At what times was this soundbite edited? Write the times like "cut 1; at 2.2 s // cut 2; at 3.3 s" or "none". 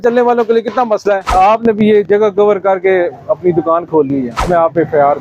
cut 1; at 1.3 s // cut 2; at 4.4 s